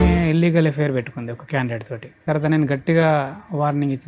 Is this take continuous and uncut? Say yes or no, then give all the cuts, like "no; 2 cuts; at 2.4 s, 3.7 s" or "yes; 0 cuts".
no; 1 cut; at 2.2 s